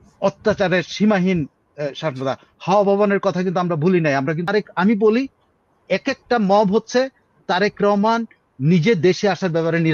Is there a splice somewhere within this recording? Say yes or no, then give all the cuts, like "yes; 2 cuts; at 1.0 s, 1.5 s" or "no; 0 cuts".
yes; 1 cut; at 4.5 s